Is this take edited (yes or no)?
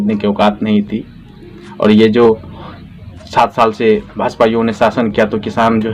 no